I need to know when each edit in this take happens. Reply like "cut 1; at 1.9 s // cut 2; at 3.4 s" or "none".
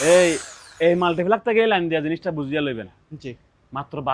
none